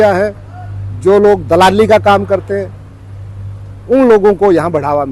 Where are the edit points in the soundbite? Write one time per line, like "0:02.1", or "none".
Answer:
none